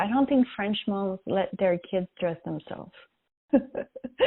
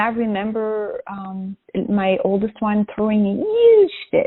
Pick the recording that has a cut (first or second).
first